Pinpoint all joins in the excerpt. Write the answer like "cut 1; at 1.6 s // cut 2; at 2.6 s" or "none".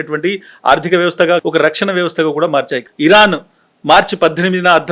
cut 1; at 1.4 s // cut 2; at 2.8 s